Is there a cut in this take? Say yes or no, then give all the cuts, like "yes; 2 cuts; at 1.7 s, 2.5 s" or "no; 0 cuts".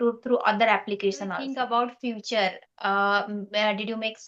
yes; 1 cut; at 1.4 s